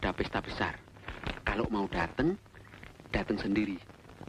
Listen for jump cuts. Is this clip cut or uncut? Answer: uncut